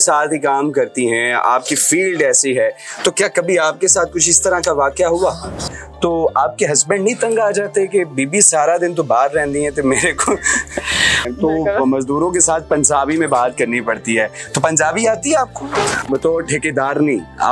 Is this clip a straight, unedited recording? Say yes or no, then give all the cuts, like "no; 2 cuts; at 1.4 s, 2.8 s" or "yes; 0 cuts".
no; 3 cuts; at 5.7 s, 11.2 s, 16.0 s